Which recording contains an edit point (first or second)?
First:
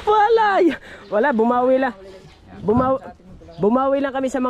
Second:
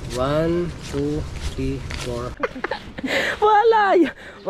second